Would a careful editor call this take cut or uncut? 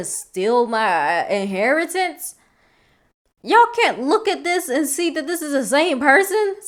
uncut